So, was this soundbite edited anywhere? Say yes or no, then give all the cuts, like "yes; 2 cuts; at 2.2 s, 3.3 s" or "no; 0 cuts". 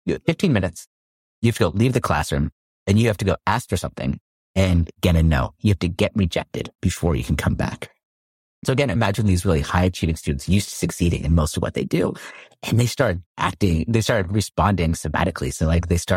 yes; 1 cut; at 8.9 s